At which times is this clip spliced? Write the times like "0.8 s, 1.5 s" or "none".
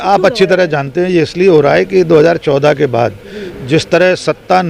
none